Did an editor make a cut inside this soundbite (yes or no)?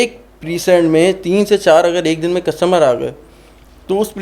no